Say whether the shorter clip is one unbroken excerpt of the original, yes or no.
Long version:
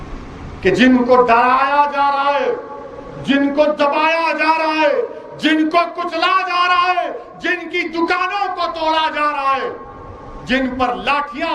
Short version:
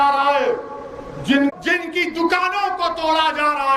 no